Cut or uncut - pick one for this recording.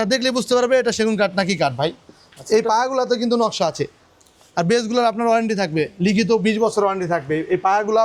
uncut